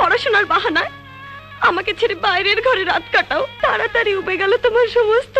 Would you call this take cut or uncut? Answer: cut